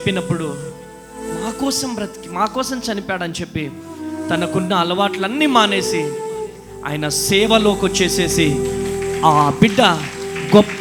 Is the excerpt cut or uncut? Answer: uncut